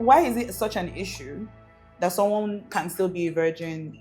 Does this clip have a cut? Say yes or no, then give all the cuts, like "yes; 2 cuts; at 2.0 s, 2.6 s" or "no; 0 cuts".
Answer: no; 0 cuts